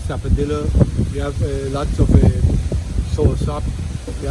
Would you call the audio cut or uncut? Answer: uncut